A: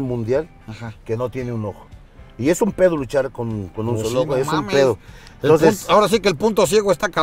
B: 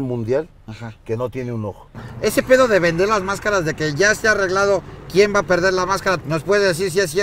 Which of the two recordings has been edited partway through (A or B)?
B